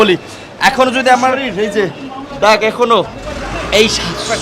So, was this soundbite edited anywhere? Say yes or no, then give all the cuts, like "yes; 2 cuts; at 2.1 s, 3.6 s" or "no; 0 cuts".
yes; 1 cut; at 1.4 s